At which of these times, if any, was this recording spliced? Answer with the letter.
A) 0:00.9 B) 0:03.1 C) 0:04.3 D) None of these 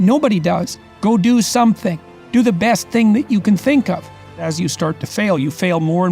C